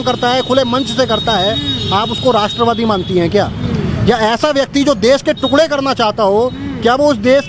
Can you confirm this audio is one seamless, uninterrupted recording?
yes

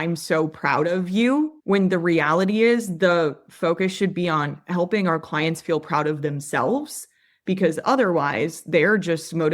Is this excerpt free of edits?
no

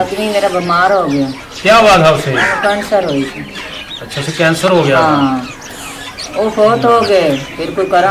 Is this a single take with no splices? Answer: yes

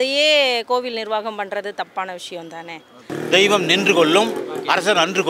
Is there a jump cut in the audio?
yes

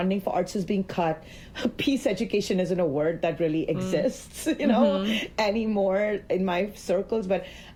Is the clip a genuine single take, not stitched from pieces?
yes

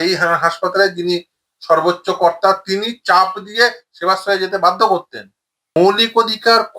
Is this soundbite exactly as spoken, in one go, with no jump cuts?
no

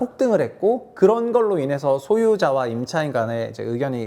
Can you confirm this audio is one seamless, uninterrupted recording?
yes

